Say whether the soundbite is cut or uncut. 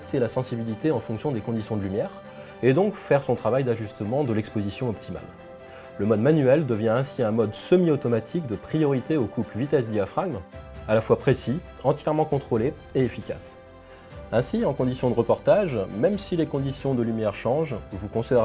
cut